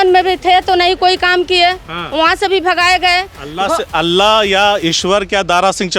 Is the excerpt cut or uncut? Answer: uncut